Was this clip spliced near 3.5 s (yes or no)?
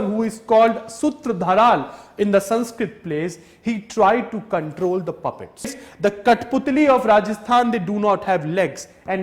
no